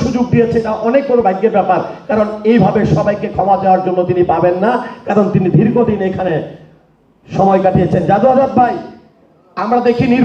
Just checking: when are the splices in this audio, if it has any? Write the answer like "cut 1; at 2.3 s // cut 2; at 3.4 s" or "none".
none